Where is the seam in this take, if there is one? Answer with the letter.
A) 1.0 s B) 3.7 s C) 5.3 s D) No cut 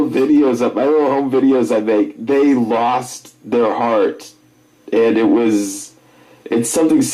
A